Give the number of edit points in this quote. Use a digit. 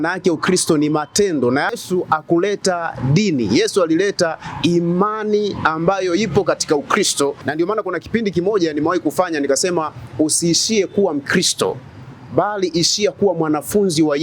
2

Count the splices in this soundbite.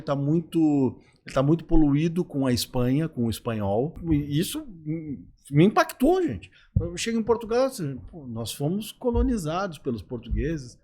1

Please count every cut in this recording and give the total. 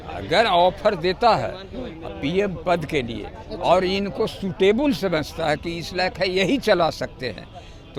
0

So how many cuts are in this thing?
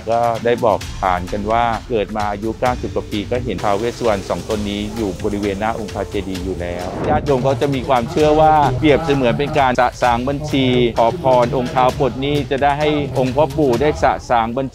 4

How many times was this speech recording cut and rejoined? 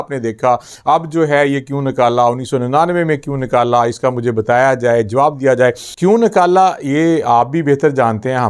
1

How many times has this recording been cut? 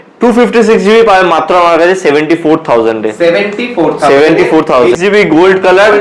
1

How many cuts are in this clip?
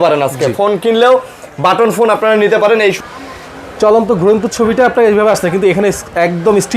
1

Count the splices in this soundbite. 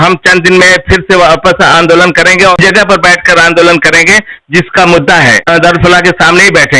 2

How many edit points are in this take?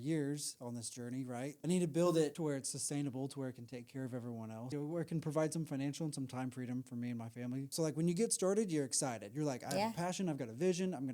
4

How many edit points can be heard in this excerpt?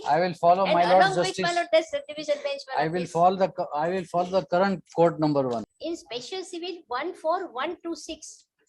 1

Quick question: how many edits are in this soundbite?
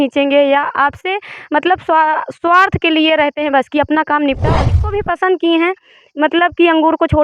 1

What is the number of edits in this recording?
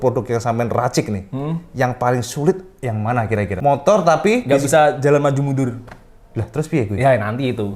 1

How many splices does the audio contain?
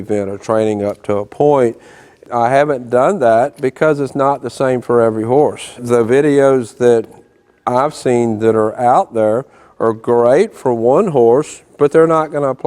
2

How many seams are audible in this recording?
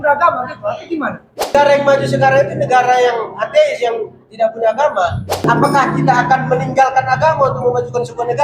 2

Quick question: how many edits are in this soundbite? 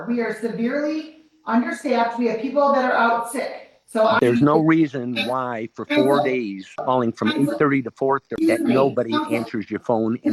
3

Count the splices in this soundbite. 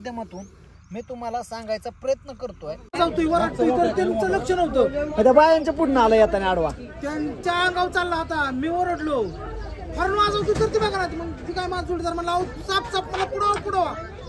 1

